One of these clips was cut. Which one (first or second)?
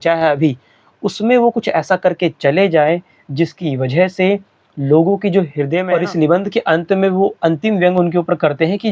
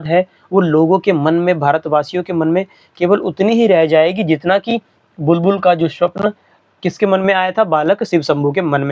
first